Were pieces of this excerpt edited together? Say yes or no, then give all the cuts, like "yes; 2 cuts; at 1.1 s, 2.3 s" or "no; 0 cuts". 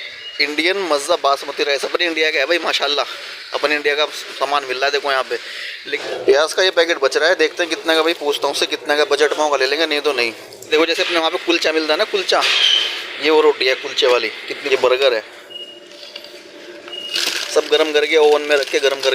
yes; 3 cuts; at 5.9 s, 10.7 s, 14.5 s